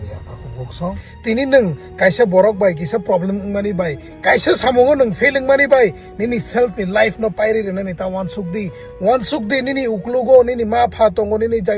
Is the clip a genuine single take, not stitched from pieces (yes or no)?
no